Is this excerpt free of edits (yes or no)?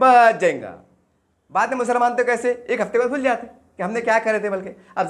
yes